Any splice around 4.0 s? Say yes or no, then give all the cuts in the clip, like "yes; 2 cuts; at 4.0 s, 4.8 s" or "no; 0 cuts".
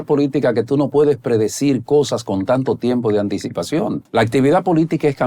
yes; 1 cut; at 4.0 s